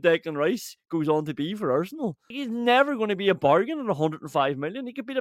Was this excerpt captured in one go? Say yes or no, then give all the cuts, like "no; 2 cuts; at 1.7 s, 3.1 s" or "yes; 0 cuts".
no; 1 cut; at 2.3 s